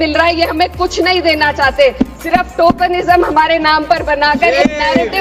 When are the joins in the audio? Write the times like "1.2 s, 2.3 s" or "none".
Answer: none